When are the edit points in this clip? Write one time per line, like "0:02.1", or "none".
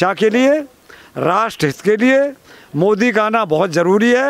none